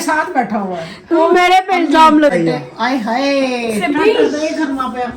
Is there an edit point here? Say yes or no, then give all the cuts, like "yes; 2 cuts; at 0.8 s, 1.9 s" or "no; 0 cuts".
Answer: yes; 1 cut; at 2.3 s